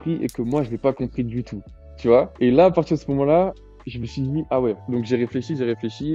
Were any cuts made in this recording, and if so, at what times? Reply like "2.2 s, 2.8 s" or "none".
none